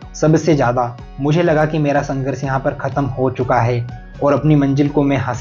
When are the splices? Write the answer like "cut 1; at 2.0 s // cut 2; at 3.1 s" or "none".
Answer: cut 1; at 1.0 s